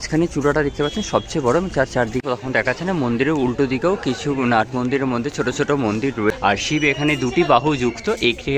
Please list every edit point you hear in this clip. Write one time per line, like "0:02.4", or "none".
0:02.2
0:06.3

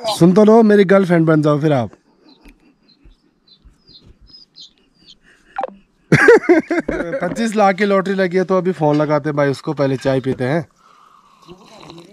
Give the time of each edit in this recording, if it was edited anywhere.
0:07.2

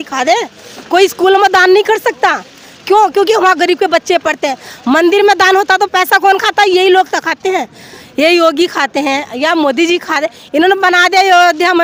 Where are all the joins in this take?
none

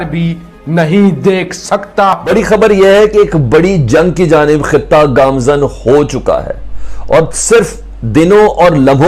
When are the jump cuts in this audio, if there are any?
0:02.2

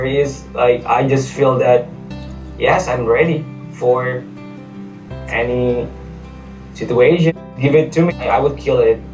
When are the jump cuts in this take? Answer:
0:07.5

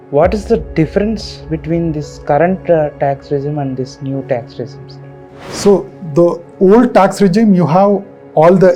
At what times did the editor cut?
none

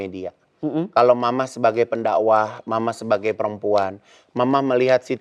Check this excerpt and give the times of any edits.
none

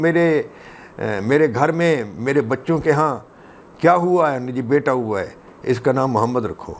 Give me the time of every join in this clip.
none

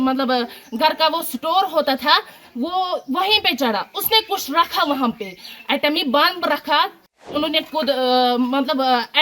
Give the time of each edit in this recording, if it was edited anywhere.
0:07.2

